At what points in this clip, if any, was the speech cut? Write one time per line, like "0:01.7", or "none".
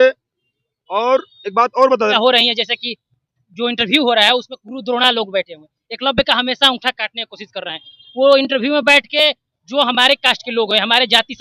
0:02.1